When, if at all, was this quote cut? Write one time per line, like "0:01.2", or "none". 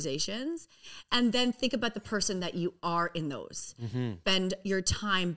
0:04.2